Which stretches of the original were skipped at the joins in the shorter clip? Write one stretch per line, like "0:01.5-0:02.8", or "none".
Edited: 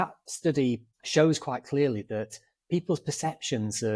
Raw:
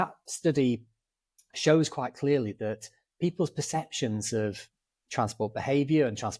0:00.9-0:01.4

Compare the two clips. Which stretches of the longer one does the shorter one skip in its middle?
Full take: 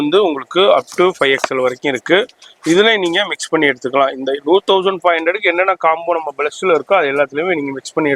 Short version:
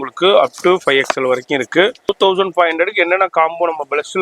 0:02.4-0:04.6

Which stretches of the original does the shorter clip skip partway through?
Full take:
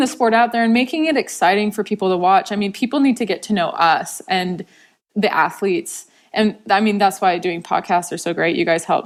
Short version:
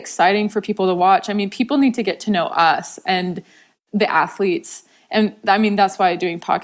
none

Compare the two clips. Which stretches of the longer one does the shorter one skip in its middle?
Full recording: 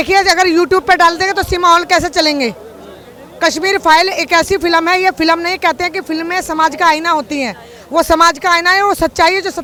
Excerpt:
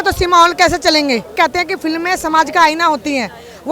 0:02.6-0:05.6

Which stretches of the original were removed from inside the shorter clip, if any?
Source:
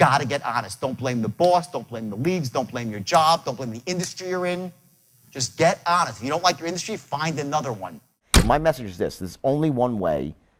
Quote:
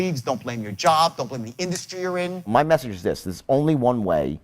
0:04.8-0:08.4

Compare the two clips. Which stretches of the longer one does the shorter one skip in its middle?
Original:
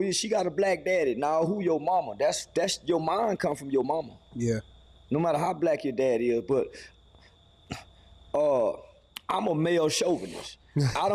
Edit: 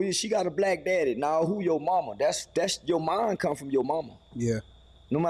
none

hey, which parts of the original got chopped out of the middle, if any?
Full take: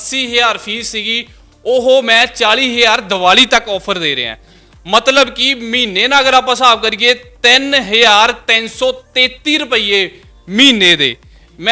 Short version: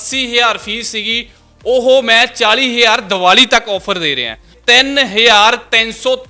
0:04.5-0:07.3

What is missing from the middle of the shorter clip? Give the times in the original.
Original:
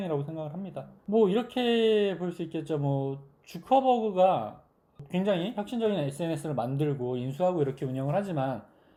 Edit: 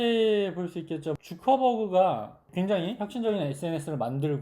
0:02.8-0:03.4
0:04.6-0:04.9

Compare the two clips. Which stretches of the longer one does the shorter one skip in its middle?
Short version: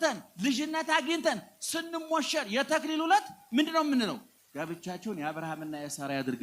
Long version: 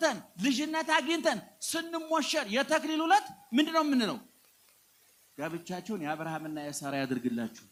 0:04.4-0:05.2

